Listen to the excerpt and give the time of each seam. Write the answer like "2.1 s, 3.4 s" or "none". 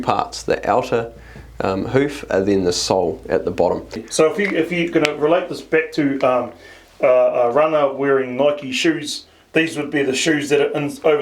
4.0 s